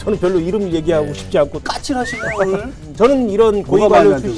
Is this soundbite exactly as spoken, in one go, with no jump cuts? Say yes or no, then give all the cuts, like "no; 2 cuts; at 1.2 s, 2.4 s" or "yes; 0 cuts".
no; 2 cuts; at 1.6 s, 2.8 s